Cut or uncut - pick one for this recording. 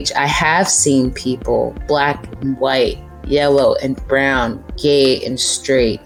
uncut